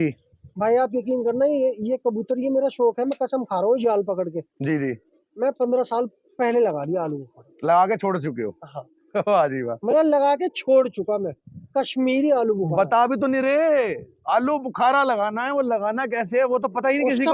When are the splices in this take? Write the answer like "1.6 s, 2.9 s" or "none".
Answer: none